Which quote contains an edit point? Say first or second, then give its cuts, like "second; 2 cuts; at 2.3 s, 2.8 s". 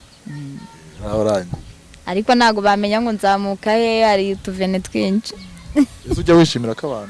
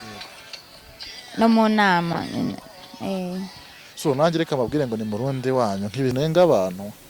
second; 1 cut; at 6.1 s